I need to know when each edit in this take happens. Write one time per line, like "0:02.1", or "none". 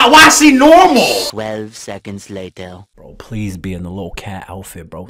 0:01.3
0:02.9